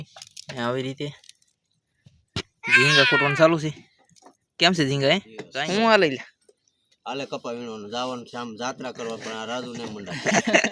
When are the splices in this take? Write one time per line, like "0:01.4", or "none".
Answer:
0:05.4